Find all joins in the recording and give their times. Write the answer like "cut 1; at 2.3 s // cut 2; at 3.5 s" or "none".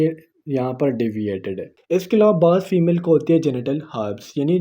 cut 1; at 1.8 s